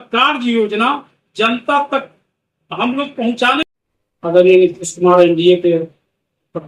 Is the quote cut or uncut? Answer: cut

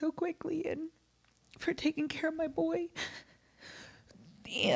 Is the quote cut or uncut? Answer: uncut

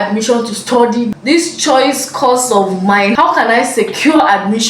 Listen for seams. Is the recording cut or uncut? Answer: cut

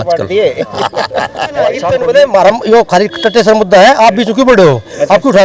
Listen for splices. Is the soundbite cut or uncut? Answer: cut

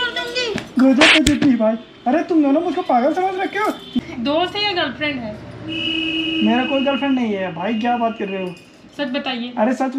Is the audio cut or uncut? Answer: cut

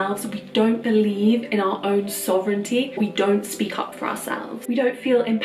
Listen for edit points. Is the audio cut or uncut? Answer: cut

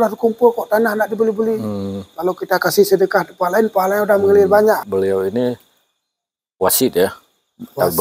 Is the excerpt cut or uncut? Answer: cut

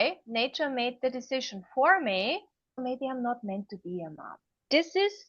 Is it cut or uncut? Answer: cut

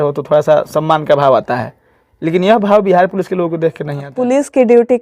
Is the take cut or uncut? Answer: cut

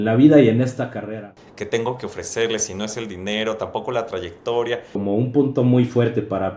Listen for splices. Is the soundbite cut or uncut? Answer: cut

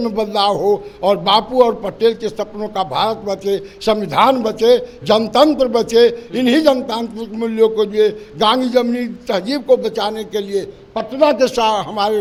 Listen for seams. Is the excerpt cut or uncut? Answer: uncut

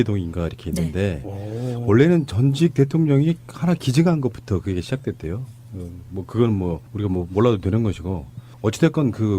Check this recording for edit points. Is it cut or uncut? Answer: cut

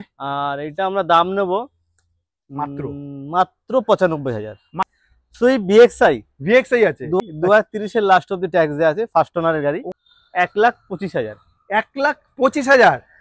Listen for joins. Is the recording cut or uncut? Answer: cut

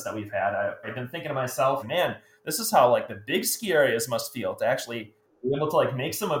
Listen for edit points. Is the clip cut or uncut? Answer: cut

